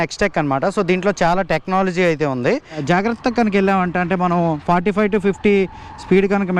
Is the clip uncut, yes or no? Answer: no